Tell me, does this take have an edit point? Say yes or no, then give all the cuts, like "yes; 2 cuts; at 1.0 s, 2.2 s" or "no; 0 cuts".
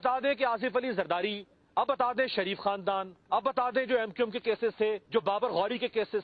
yes; 3 cuts; at 1.9 s, 3.4 s, 5.0 s